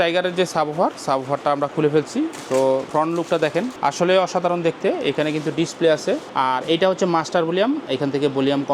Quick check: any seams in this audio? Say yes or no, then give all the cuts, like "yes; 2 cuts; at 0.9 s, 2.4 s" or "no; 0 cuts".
yes; 3 cuts; at 2.9 s, 3.7 s, 6.3 s